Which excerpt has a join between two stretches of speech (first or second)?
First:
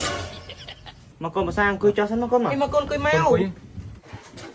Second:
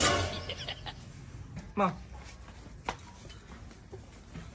first